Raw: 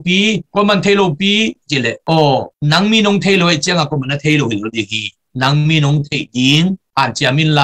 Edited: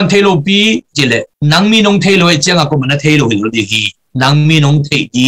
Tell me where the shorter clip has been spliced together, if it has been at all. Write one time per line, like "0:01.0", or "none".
0:01.3

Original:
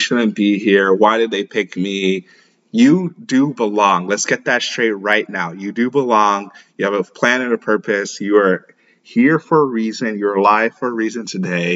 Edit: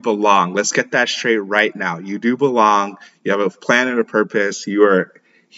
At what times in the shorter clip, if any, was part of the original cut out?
none

